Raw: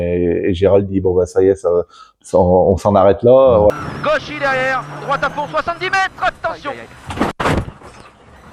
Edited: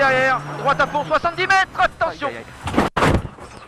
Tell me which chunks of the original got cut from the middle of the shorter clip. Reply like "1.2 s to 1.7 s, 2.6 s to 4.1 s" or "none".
none